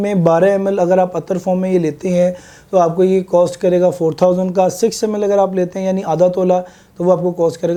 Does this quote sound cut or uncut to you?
uncut